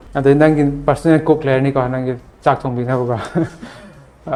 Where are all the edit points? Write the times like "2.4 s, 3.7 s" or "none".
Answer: none